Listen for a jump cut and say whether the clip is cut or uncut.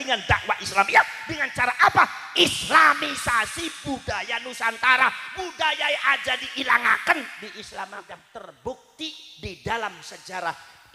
cut